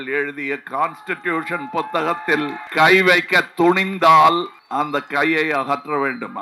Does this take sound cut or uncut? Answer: cut